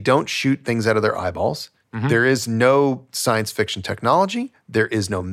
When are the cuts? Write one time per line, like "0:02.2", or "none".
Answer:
0:01.7